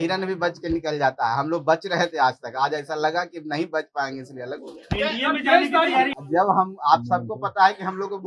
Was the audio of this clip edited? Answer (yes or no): yes